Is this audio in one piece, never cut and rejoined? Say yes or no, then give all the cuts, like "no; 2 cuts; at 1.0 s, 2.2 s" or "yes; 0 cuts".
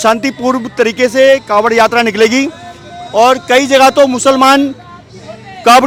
yes; 0 cuts